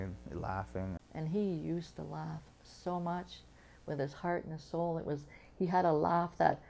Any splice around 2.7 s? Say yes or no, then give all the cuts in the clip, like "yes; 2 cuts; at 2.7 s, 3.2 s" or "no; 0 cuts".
no; 1 cut; at 1.1 s